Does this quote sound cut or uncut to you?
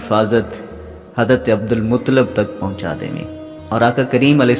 uncut